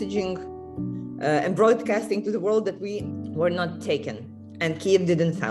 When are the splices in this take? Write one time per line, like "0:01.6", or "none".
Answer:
0:03.0

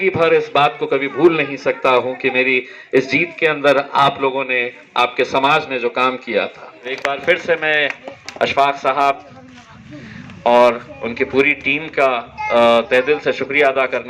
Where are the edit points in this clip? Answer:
0:07.0

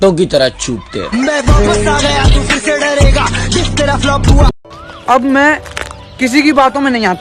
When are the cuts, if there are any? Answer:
0:04.5

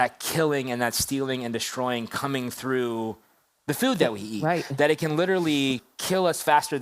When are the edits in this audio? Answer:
0:05.9

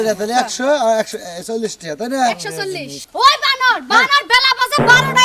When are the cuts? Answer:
0:03.0

